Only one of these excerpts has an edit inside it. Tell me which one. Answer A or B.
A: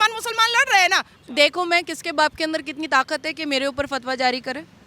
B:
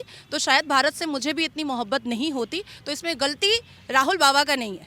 A